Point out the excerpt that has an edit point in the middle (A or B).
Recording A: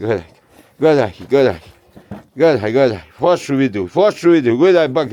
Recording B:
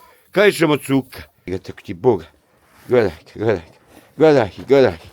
B